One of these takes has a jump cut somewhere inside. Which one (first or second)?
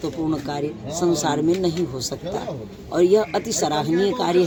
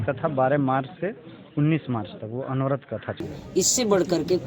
second